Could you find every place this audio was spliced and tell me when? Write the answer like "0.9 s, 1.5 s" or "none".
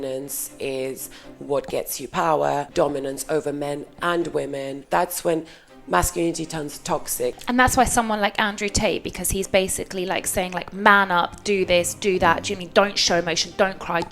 2.7 s, 4.8 s, 7.4 s